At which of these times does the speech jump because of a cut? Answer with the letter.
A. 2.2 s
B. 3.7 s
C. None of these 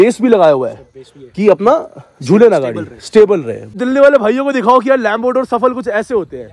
B